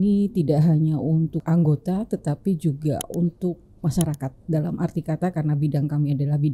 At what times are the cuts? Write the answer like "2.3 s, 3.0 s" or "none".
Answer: 1.4 s

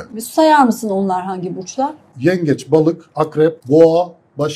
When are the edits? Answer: 2.0 s, 3.6 s

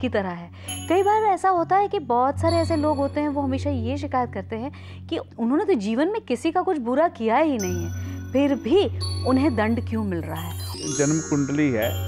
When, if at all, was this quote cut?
10.8 s

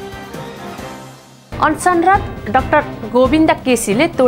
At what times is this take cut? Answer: none

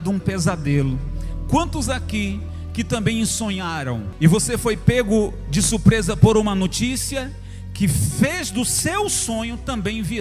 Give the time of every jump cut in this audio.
4.1 s

